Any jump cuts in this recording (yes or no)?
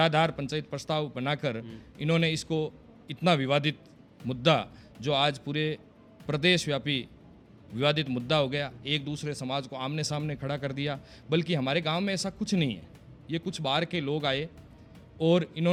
no